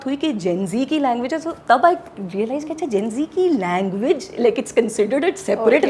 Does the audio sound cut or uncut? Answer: uncut